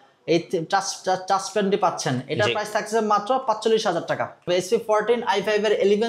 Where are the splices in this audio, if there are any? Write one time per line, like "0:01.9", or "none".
0:04.5